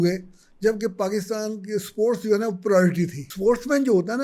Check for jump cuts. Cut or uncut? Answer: cut